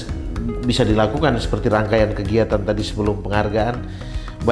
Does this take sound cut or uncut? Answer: uncut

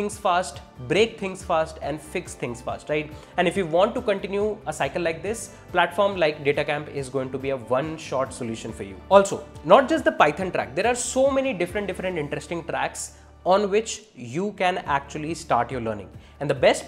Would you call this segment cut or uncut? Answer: uncut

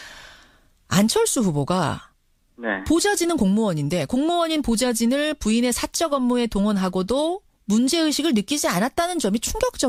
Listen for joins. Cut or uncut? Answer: uncut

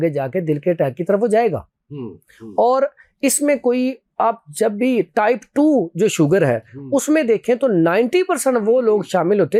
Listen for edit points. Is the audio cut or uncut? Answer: uncut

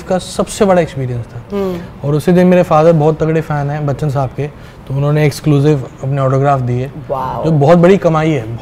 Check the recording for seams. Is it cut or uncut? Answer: uncut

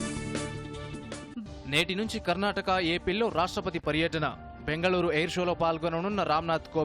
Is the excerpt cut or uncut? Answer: uncut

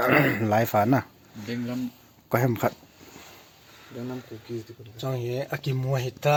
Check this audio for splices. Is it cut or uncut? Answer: uncut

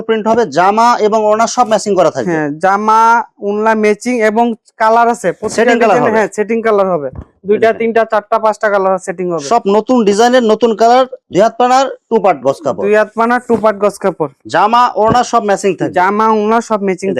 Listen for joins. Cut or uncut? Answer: uncut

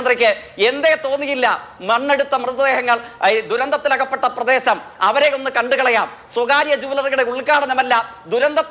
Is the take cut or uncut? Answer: uncut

